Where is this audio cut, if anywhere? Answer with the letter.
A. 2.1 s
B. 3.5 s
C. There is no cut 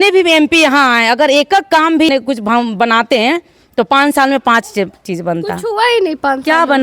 A